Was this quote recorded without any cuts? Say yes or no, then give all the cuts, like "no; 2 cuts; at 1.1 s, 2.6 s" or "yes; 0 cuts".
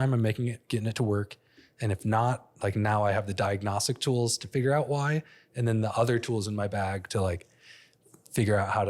yes; 0 cuts